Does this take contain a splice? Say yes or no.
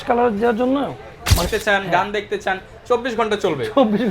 yes